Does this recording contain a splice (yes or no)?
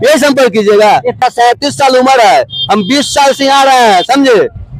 yes